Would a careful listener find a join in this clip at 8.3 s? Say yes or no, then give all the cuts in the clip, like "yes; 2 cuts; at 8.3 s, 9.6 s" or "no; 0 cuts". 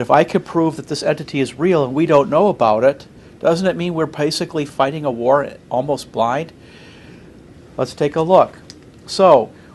no; 0 cuts